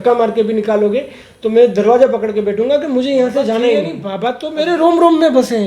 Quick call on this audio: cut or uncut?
cut